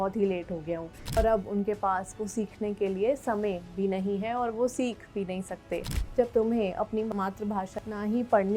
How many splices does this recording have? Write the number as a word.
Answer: two